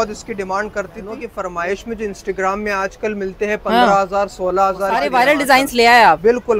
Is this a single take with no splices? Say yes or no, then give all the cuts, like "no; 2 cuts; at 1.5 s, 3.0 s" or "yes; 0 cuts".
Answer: no; 2 cuts; at 1.3 s, 5.0 s